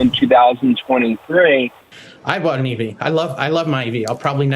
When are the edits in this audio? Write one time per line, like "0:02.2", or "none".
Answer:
0:01.8